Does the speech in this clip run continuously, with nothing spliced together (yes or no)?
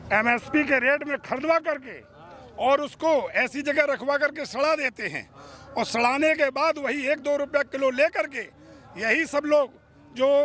yes